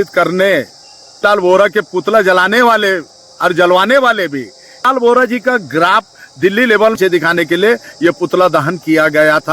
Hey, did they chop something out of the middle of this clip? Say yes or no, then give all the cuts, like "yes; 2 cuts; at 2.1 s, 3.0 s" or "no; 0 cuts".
yes; 3 cuts; at 1.2 s, 4.9 s, 7.0 s